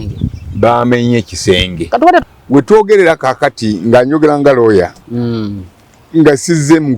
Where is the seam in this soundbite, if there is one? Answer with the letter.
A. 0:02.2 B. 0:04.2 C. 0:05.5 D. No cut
A